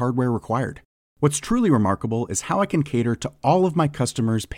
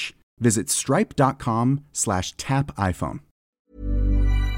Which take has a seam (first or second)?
second